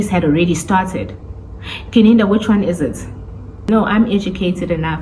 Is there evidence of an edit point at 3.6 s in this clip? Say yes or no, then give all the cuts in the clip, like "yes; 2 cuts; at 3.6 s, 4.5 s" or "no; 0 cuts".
yes; 1 cut; at 3.6 s